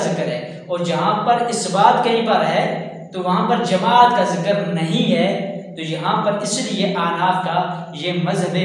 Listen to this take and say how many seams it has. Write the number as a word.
zero